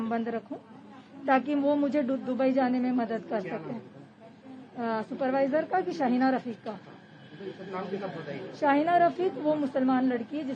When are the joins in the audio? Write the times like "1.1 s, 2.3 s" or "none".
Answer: none

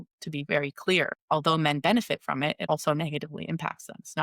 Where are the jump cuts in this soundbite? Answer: 1.2 s, 2.7 s

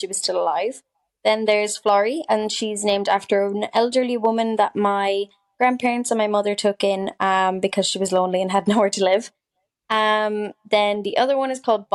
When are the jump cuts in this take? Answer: none

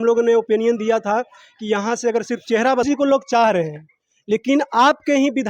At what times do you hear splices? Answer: 2.8 s

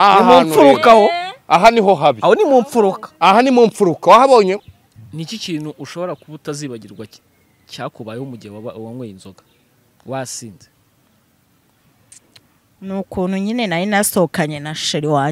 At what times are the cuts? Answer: 4.6 s

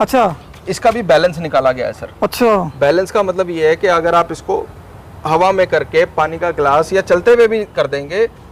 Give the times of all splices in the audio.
none

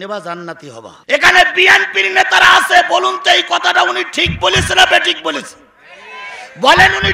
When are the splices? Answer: 0.9 s

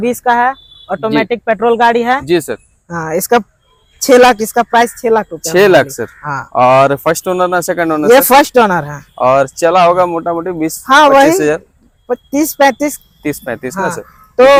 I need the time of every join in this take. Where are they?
none

